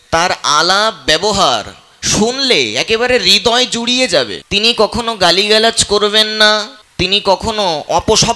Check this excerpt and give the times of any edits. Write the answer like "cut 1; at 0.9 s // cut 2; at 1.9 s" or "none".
cut 1; at 4.4 s // cut 2; at 6.8 s